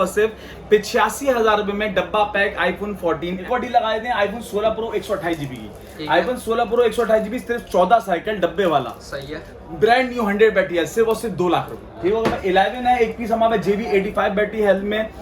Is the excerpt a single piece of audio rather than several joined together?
no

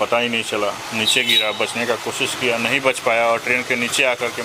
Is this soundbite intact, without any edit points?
yes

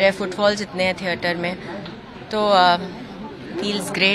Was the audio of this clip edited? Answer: no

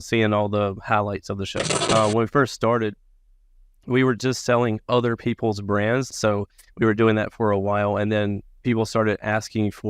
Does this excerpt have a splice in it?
yes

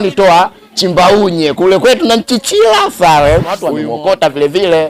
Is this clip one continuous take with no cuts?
no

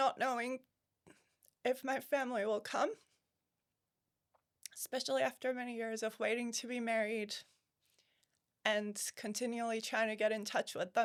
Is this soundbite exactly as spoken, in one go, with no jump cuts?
yes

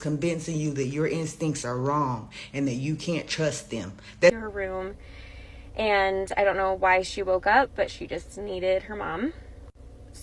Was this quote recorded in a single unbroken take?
no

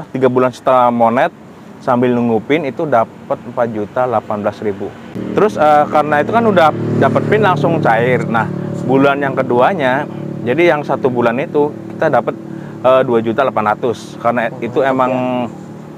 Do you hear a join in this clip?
yes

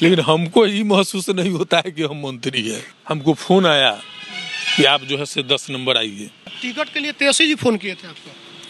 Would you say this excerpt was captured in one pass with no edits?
no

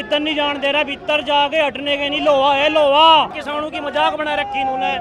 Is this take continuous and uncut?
no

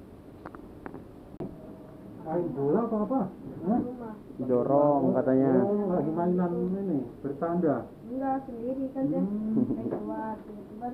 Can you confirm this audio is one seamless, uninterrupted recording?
no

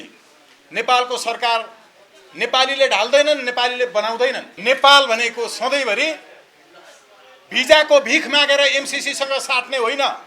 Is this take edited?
yes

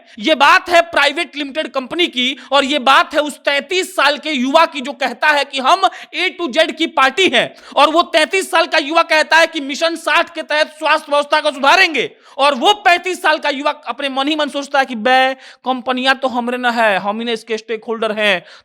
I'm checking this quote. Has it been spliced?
no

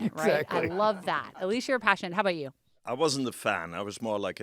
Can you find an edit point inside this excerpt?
yes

